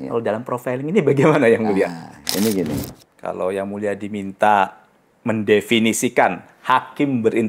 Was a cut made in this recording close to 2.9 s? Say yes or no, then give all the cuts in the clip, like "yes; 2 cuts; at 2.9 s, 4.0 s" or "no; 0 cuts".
yes; 1 cut; at 2.9 s